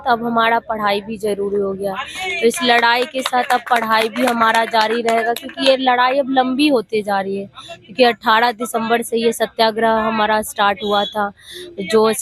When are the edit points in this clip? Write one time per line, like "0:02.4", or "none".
none